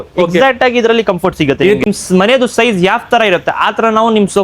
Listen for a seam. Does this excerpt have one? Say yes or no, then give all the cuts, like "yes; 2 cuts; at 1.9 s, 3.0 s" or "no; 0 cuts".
yes; 1 cut; at 1.8 s